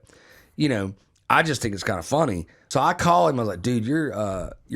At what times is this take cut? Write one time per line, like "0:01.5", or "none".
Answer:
0:02.5